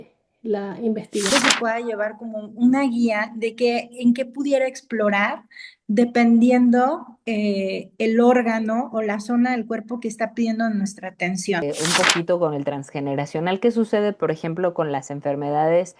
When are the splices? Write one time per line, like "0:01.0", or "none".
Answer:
0:01.3
0:11.6